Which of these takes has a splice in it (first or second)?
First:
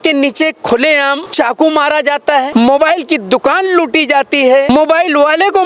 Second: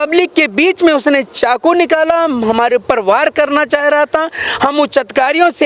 first